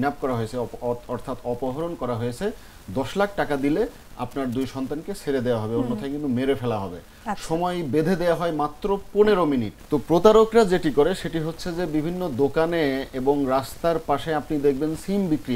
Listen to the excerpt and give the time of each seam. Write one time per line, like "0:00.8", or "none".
0:09.8